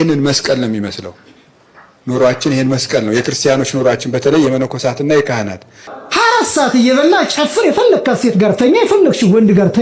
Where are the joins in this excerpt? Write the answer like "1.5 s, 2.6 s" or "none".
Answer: 6.0 s